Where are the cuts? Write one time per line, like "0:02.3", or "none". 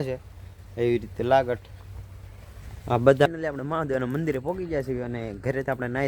0:03.3